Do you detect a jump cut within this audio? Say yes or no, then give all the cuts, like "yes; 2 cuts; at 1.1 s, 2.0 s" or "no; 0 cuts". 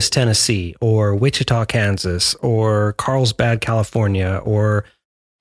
no; 0 cuts